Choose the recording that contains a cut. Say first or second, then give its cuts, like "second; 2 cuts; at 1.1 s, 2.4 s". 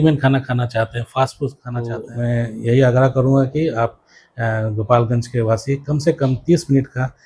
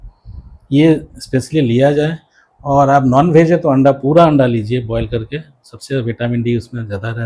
first; 1 cut; at 2.0 s